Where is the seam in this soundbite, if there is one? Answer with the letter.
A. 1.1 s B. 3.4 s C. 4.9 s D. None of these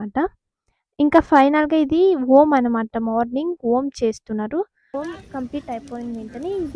C